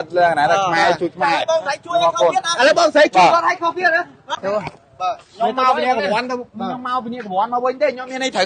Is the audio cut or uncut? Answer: cut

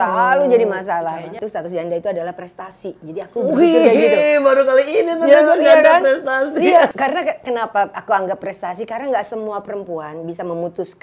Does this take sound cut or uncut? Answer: cut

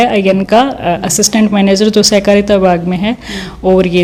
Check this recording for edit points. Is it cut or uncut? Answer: uncut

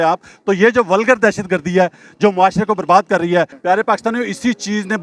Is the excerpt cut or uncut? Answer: cut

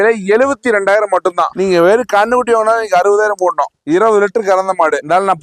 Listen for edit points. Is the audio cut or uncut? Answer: uncut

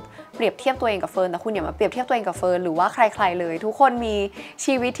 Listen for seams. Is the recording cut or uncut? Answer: uncut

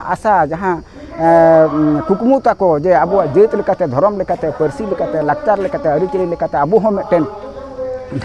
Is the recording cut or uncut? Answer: uncut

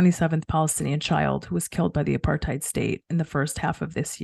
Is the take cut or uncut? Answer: uncut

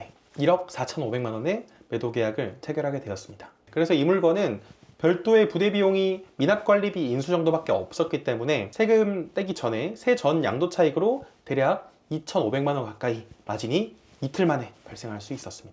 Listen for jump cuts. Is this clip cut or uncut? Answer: uncut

